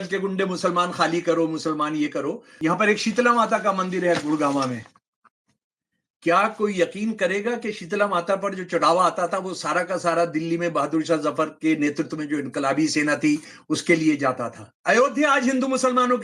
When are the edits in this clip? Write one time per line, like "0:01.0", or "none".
0:02.5